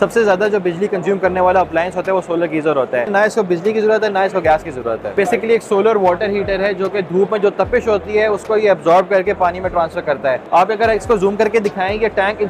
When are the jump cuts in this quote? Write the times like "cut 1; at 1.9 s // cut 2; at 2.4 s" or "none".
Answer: cut 1; at 3.1 s // cut 2; at 5.1 s // cut 3; at 10.4 s